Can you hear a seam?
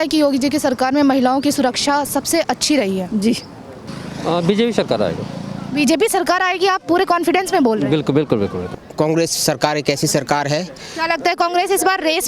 yes; 2 cuts; at 3.6 s, 8.8 s

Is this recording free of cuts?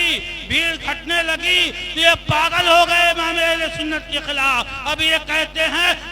yes; 0 cuts

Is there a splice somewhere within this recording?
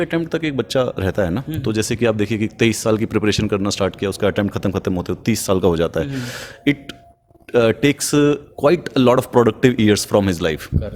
no; 0 cuts

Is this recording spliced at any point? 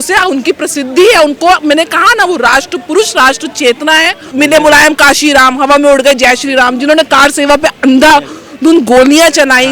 yes; 1 cut; at 4.2 s

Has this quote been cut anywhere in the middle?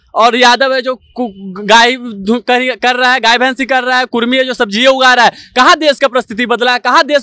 no; 0 cuts

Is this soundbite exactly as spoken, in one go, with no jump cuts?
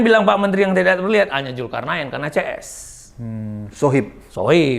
yes; 0 cuts

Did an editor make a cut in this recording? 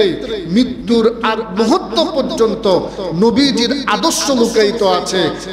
no; 0 cuts

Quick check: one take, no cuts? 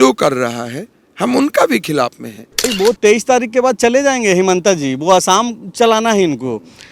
no; 1 cut; at 2.7 s

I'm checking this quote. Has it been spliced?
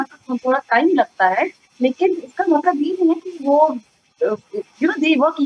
no; 0 cuts

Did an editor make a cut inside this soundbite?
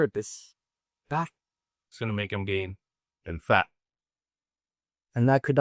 no; 0 cuts

